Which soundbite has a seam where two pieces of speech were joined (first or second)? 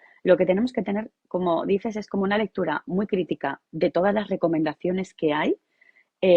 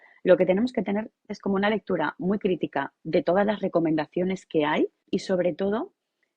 second